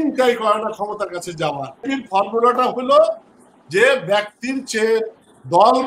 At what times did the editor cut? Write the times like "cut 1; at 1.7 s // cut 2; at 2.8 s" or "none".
cut 1; at 1.9 s